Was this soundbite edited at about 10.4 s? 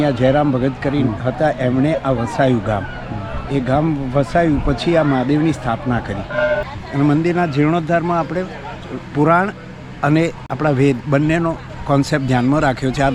yes; 3 cuts; at 6.7 s, 10.4 s, 11.7 s

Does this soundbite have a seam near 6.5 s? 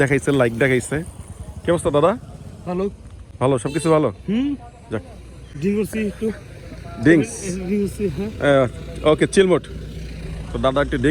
no; 0 cuts

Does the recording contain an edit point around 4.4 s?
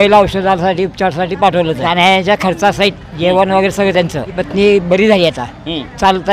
yes; 2 cuts; at 1.9 s, 4.4 s

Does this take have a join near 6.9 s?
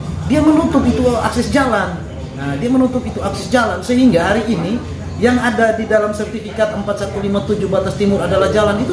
no; 0 cuts

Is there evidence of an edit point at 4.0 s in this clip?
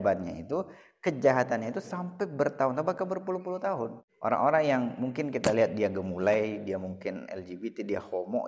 yes; 1 cut; at 4.0 s

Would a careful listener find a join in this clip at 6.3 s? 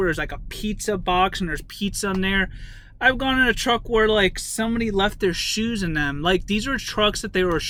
no; 0 cuts

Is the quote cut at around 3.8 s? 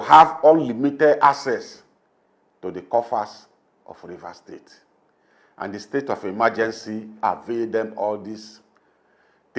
no; 0 cuts

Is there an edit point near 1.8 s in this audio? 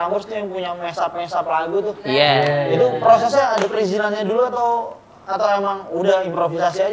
no; 0 cuts

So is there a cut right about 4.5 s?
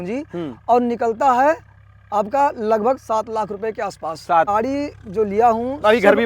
yes; 1 cut; at 4.5 s

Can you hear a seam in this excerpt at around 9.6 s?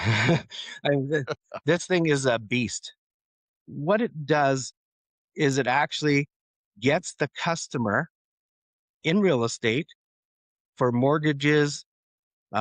no; 0 cuts

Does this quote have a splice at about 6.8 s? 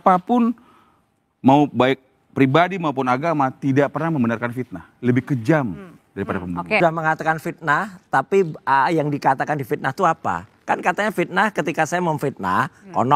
yes; 1 cut; at 6.8 s

